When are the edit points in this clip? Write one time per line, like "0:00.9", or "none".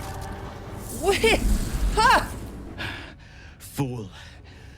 0:02.8